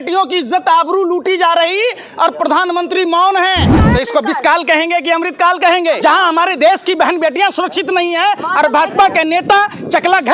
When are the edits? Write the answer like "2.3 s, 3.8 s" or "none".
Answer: 3.8 s, 6.0 s